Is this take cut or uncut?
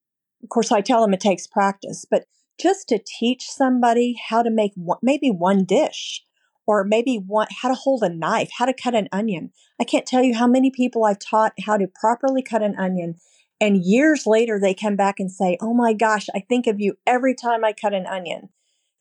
uncut